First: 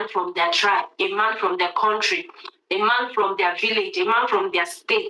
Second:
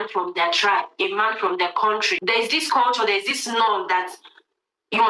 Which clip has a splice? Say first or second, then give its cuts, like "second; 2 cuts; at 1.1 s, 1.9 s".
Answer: second; 1 cut; at 2.1 s